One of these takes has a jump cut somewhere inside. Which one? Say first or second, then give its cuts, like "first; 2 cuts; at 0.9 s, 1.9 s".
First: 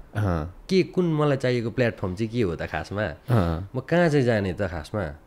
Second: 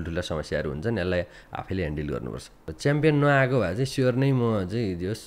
second; 1 cut; at 2.6 s